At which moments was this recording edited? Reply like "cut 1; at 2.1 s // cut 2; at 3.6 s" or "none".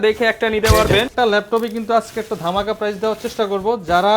cut 1; at 1.1 s